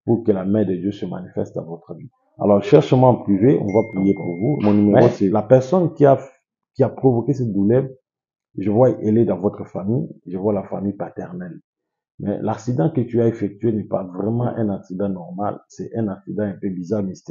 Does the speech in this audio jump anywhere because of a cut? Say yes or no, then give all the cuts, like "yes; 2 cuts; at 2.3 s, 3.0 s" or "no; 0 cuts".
yes; 1 cut; at 5.3 s